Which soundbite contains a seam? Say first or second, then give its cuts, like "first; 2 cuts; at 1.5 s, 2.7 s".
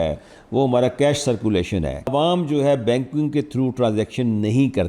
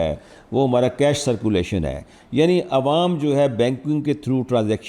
first; 1 cut; at 2.1 s